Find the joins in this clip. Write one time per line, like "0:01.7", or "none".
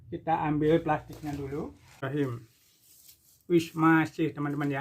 0:02.0